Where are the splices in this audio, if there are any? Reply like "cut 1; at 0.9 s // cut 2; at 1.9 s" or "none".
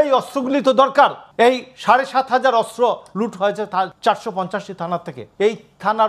cut 1; at 0.9 s // cut 2; at 3.9 s // cut 3; at 5.2 s